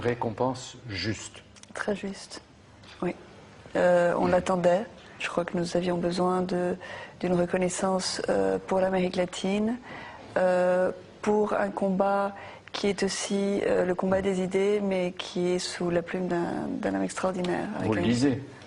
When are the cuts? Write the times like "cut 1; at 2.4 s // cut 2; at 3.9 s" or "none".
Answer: cut 1; at 15.6 s